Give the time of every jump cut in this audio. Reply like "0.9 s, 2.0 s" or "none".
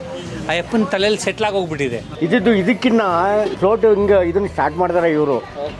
2.1 s, 3.5 s